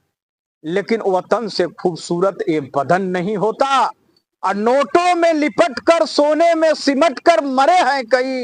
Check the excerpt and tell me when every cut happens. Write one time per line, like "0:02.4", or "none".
none